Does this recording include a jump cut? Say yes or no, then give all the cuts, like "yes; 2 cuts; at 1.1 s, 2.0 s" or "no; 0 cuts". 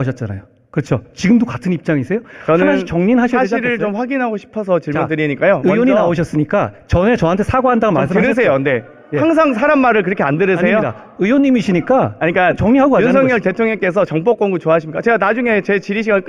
no; 0 cuts